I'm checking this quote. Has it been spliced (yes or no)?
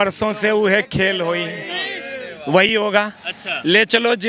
no